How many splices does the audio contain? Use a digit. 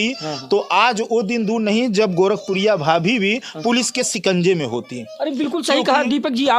0